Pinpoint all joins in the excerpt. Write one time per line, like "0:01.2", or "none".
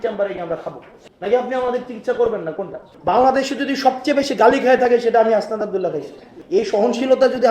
0:02.9
0:06.3